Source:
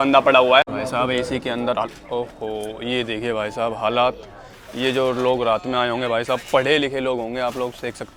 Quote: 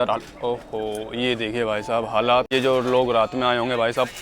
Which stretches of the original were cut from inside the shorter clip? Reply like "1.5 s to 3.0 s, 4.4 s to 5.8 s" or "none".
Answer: 4.2 s to 4.8 s